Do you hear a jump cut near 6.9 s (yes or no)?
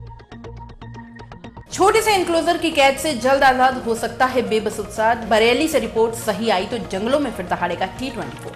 no